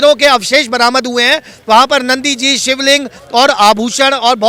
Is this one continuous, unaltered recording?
yes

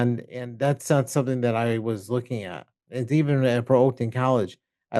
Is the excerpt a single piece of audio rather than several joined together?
yes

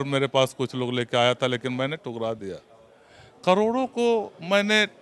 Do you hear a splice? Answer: no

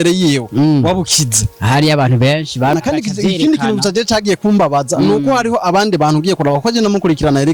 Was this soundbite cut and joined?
yes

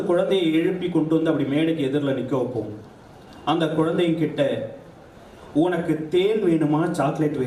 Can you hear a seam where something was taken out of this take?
no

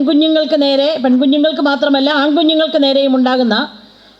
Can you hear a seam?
no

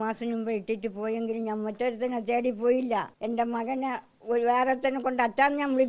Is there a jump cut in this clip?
yes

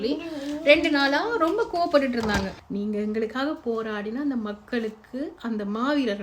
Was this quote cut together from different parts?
yes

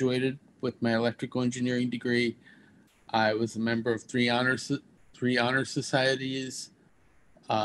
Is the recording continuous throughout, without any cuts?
yes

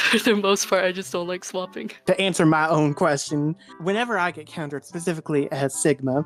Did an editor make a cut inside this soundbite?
no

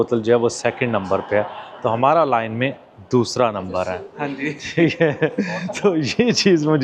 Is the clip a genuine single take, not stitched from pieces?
yes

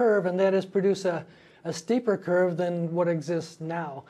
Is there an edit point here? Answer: yes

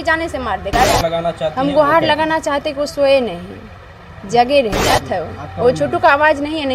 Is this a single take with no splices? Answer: no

